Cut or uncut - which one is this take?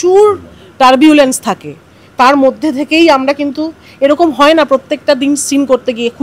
uncut